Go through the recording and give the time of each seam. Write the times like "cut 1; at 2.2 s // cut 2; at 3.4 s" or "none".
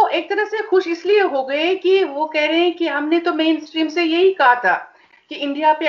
none